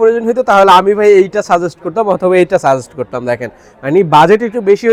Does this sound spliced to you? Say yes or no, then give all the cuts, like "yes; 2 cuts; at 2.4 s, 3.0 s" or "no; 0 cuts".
no; 0 cuts